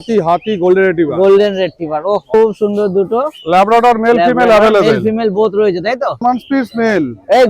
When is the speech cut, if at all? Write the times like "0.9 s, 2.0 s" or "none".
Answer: 2.3 s, 6.2 s